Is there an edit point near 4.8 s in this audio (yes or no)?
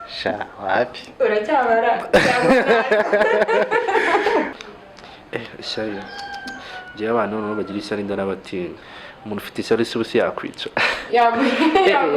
yes